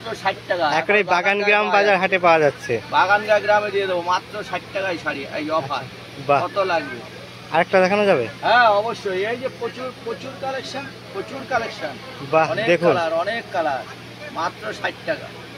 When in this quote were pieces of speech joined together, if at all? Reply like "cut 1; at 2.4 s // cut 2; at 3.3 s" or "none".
none